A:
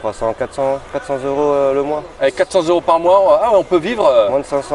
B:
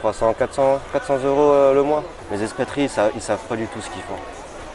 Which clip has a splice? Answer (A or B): B